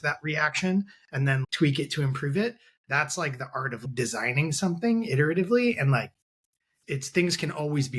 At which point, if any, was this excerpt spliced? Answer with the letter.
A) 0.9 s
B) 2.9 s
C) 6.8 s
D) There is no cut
C